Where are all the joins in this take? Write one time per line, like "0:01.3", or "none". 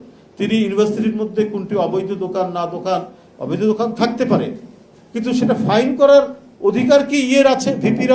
none